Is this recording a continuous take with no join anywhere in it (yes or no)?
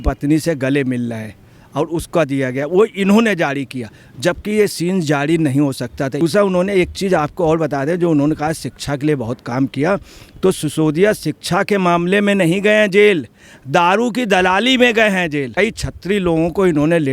no